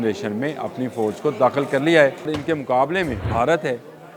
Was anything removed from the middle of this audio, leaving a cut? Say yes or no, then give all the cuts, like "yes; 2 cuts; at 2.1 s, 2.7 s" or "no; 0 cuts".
yes; 2 cuts; at 2.4 s, 3.2 s